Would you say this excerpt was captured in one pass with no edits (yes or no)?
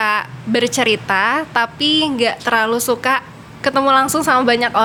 yes